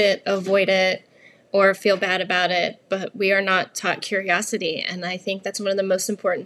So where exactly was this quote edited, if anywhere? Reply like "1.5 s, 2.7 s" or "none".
none

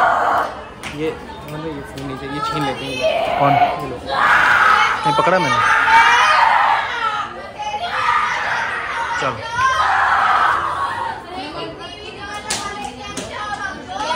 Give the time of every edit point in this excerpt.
none

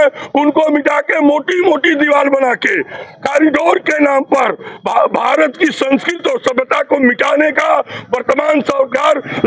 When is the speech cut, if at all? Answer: none

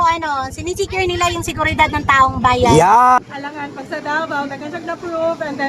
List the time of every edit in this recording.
3.2 s

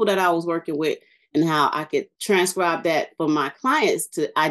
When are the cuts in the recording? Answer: 2.1 s

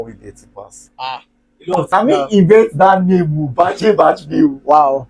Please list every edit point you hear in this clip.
1.9 s

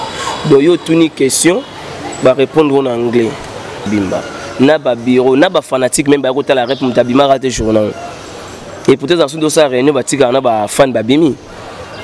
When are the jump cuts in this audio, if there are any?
3.9 s

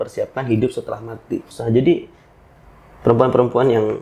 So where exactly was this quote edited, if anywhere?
1.4 s

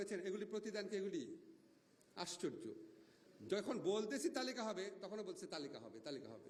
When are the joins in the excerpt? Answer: none

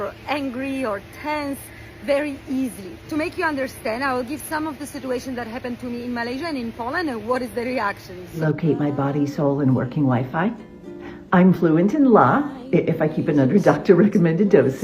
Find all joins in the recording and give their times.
8.4 s

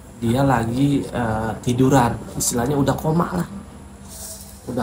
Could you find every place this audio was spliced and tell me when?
none

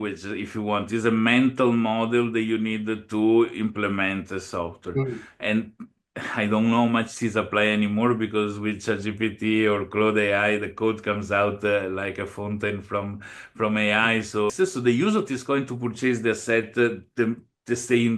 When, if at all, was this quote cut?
14.5 s

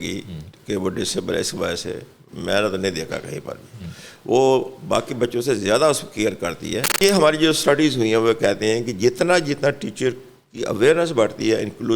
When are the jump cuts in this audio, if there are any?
6.9 s

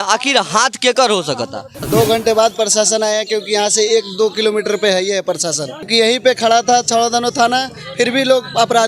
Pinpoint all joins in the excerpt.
1.7 s, 5.9 s

